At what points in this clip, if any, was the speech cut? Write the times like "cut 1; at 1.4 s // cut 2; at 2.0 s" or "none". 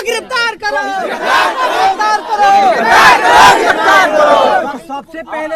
cut 1; at 2.0 s